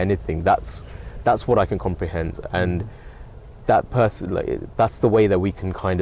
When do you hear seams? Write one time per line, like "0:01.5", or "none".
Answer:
none